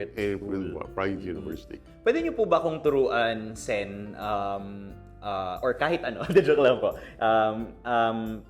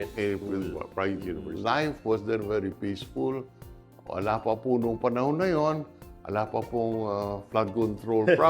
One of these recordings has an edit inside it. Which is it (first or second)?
second